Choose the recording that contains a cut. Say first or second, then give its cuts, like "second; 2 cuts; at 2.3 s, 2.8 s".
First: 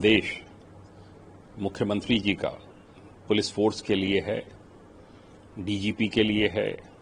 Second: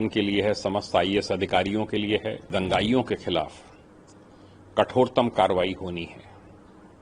second; 1 cut; at 2.5 s